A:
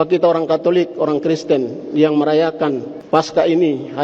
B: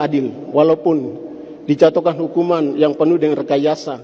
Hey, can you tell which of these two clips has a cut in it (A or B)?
A